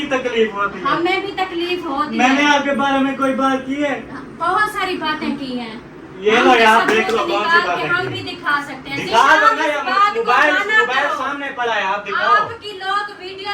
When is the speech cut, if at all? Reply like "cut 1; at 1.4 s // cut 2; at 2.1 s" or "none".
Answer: none